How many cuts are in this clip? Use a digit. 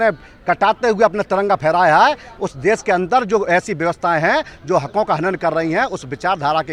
0